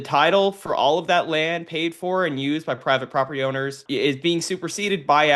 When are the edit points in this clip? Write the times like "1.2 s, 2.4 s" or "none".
3.8 s